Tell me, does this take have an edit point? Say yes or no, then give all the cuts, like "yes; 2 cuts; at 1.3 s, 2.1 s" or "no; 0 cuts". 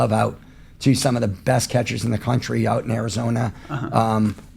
no; 0 cuts